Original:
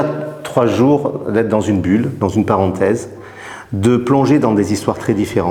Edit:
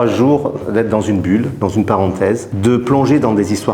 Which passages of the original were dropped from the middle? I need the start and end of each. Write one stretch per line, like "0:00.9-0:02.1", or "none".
0:03.1-0:03.7